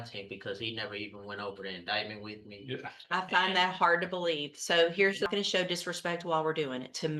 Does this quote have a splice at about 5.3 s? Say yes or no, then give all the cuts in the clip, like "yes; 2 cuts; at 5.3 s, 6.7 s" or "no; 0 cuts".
yes; 1 cut; at 5.3 s